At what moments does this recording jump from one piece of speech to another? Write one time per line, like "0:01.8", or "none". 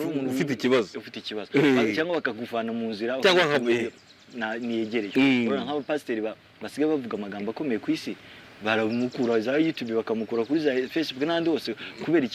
none